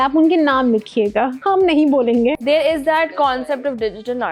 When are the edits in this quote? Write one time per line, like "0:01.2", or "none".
0:01.4
0:02.4